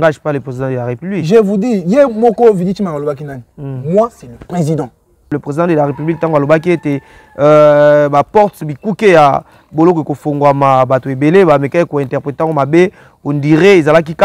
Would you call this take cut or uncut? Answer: cut